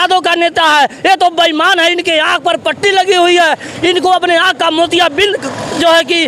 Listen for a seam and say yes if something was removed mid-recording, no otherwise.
no